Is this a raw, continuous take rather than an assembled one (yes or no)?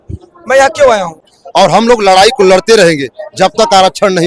no